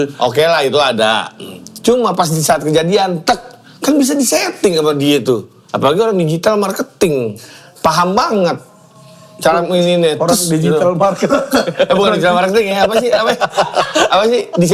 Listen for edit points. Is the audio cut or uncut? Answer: uncut